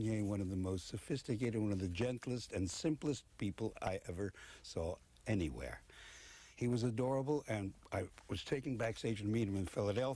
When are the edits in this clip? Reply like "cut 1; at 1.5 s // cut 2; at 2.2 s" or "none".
none